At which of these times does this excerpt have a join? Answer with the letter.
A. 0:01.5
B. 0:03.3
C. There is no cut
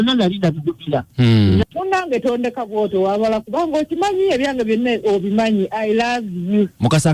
A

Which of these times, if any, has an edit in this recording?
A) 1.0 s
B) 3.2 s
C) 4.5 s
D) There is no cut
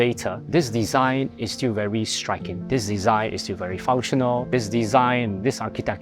C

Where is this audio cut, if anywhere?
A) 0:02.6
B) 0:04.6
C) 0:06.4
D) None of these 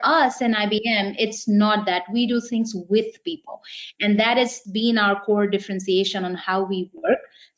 B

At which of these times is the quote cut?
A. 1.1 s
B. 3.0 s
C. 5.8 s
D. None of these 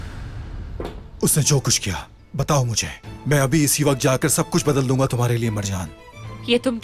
A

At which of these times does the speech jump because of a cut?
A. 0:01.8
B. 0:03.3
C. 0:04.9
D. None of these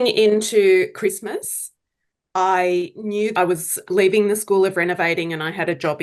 B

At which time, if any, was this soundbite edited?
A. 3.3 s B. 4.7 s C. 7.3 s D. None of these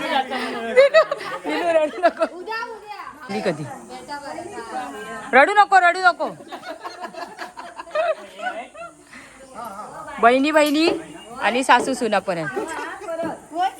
A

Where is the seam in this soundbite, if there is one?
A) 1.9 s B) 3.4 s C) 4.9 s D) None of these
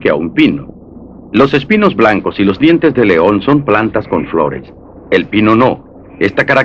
A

